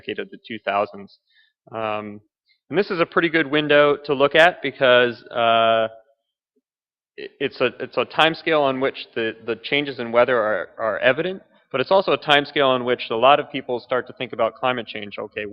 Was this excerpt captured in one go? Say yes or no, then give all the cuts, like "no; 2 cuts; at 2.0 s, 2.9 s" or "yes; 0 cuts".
no; 1 cut; at 7.9 s